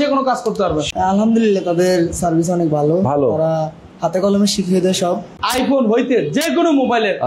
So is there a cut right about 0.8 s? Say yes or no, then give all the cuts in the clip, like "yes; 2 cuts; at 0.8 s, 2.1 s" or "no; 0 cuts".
yes; 2 cuts; at 0.8 s, 5.4 s